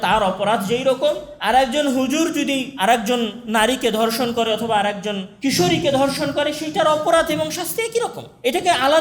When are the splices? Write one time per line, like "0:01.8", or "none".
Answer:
0:01.3
0:02.7

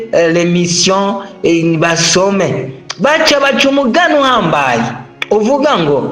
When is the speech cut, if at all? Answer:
none

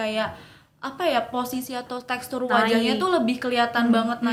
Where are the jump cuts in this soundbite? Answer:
none

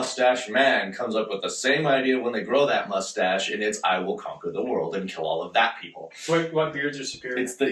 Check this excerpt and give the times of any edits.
none

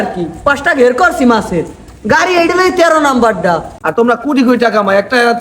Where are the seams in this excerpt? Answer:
0:03.8

